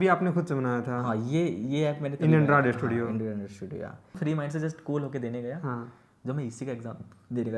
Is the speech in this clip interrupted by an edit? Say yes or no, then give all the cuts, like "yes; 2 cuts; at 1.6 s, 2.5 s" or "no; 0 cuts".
yes; 1 cut; at 4.2 s